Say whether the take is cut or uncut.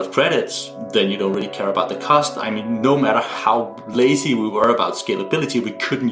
uncut